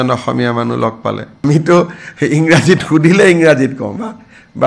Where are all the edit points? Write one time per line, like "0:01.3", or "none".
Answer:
0:01.4